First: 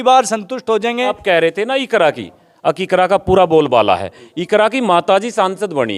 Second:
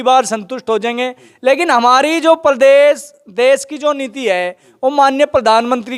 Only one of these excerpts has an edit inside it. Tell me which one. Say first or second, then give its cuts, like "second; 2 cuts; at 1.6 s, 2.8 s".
first; 1 cut; at 1.2 s